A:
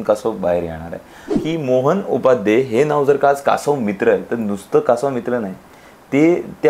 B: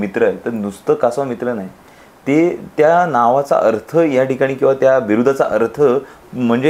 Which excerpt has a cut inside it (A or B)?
A